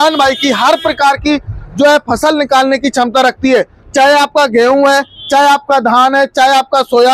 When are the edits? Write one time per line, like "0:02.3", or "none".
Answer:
none